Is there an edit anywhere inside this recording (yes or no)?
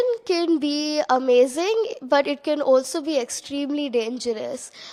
no